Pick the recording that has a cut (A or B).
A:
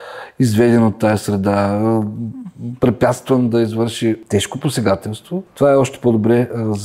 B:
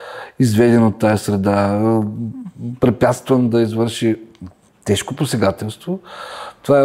A